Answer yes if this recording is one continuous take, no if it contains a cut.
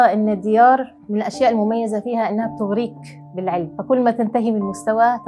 no